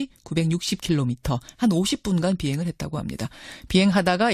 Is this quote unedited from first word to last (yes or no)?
yes